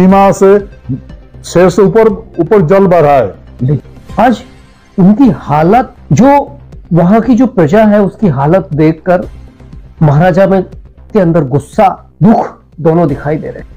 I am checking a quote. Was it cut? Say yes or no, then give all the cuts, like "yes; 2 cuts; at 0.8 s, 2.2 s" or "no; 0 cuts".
yes; 3 cuts; at 3.8 s, 6.0 s, 12.1 s